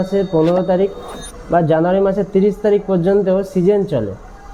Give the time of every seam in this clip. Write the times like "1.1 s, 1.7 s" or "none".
none